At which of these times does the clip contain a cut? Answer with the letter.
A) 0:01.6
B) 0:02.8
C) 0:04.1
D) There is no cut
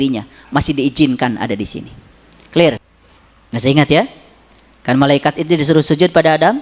B